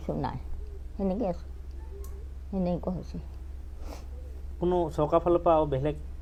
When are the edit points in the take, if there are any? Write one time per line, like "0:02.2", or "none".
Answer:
none